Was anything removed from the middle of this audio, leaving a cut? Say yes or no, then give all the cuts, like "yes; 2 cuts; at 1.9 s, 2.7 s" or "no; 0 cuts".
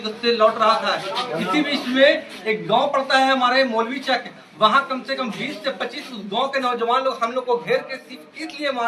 no; 0 cuts